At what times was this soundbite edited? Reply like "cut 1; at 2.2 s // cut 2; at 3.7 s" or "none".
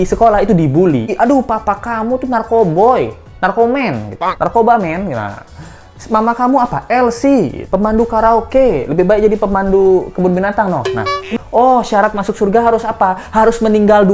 cut 1; at 1.1 s // cut 2; at 11.4 s